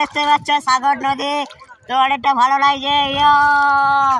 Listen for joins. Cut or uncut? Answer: uncut